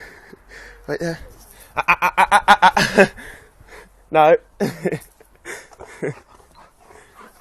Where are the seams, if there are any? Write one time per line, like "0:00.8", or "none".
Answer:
none

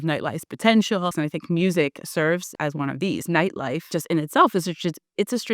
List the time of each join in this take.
0:01.1
0:02.5
0:03.8

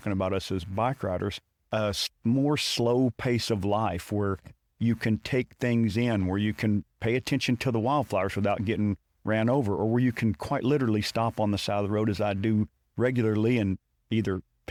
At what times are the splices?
none

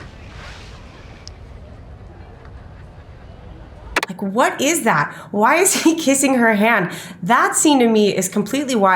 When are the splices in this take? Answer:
none

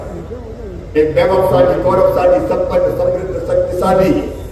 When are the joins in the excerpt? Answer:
none

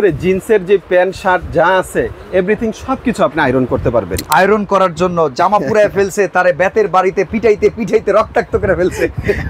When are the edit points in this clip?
0:04.2

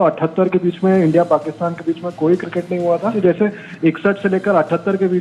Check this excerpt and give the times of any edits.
0:03.2

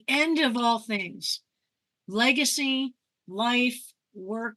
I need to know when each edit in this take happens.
none

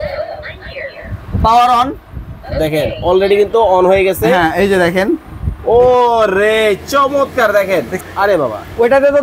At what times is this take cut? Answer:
0:08.0

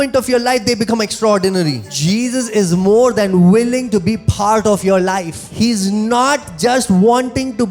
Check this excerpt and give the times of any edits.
0:01.9
0:05.3

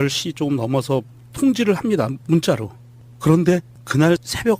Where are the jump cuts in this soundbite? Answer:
0:01.3

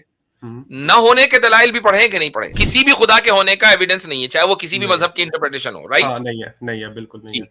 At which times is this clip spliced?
0:02.6

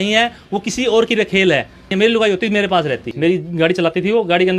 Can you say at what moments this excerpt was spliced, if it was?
0:01.9
0:03.1

